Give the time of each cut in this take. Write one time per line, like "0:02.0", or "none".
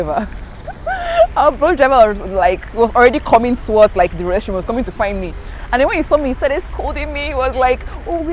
none